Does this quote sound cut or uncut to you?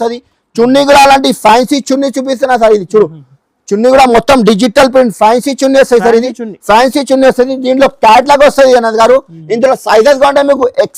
uncut